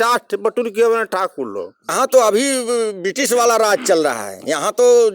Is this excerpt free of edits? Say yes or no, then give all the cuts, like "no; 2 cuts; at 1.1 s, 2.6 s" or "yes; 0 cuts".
no; 1 cut; at 1.9 s